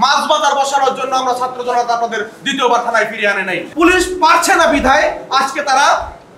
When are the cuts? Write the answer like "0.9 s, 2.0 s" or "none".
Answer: 3.7 s